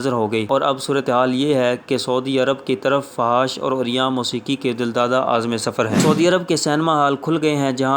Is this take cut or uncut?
cut